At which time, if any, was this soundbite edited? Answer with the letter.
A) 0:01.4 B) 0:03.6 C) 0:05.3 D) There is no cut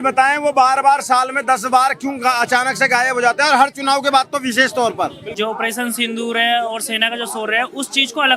C